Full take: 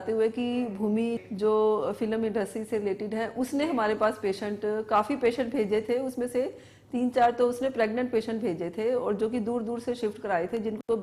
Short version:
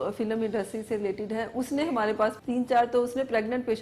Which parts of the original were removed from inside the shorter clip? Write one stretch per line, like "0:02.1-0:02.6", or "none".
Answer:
0:04.2-0:06.8